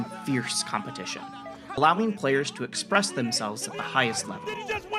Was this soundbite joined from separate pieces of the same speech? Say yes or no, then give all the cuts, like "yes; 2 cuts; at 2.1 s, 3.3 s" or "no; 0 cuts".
yes; 1 cut; at 1.8 s